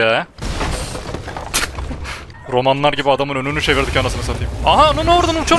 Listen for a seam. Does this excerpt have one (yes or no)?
yes